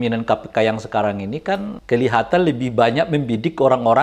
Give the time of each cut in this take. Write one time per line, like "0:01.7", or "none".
0:01.7